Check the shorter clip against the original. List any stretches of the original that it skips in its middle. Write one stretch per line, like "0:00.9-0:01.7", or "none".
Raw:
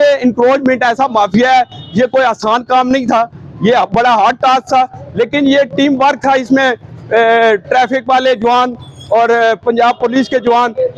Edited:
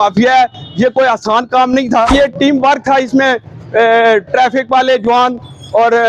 0:03.3-0:05.5